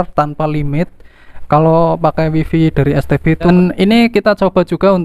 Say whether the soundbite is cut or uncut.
cut